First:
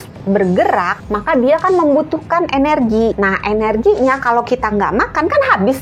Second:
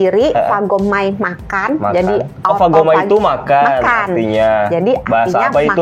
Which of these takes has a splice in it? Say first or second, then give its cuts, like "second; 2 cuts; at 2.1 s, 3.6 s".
first; 2 cuts; at 0.9 s, 3.1 s